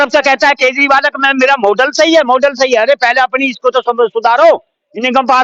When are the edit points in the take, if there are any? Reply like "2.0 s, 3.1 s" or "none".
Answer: none